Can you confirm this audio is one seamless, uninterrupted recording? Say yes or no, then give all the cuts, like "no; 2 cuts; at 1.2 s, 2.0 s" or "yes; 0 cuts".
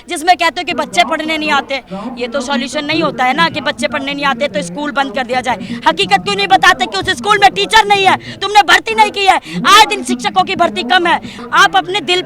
no; 1 cut; at 11.3 s